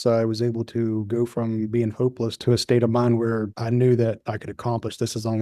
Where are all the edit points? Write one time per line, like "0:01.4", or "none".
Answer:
none